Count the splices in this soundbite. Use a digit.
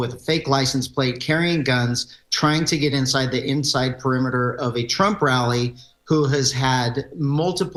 0